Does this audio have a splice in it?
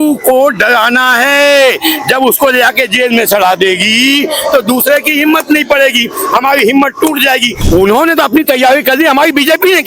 yes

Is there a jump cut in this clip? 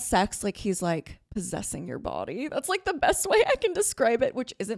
no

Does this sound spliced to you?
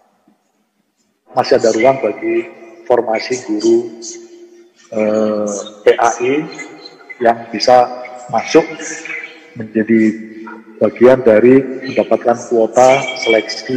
yes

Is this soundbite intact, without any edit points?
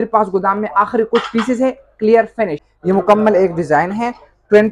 no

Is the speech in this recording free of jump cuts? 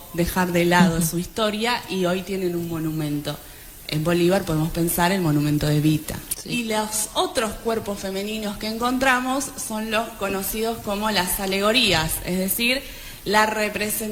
no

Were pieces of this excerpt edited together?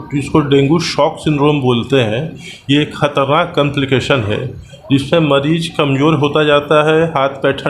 no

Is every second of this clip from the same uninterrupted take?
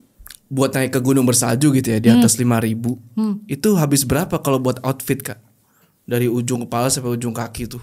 yes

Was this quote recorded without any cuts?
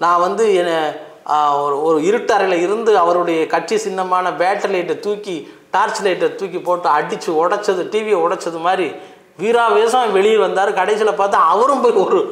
yes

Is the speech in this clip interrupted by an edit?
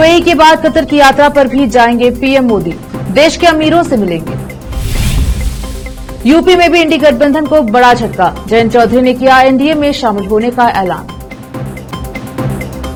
no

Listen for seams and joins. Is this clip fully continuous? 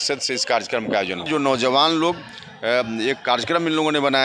no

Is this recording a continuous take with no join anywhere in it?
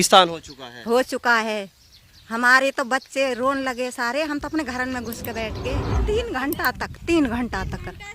no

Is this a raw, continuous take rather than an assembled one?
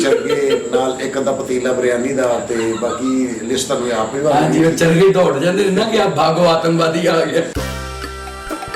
no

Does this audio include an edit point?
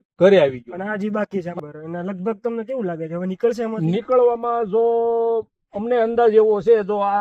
yes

